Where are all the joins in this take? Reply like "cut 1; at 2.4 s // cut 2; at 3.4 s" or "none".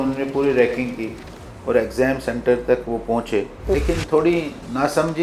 cut 1; at 3.7 s